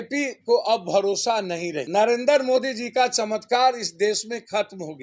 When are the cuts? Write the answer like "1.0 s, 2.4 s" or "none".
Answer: 1.8 s